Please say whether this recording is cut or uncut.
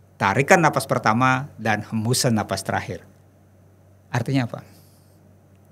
uncut